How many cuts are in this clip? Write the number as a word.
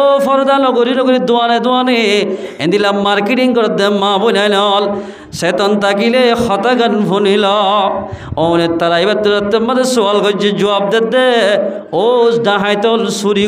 zero